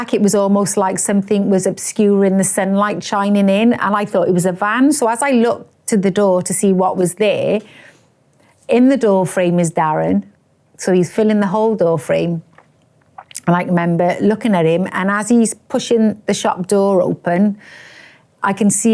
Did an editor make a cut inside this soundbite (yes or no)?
no